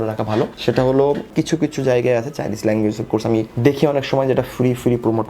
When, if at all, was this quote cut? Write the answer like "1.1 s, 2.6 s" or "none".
1.3 s